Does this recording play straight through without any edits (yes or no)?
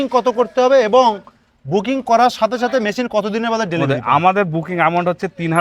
yes